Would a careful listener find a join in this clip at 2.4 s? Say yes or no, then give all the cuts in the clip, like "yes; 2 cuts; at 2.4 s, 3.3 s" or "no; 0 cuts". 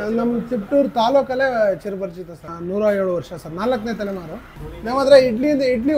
yes; 2 cuts; at 2.4 s, 4.4 s